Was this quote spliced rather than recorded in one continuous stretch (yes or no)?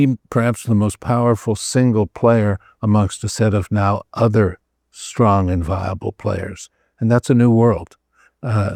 no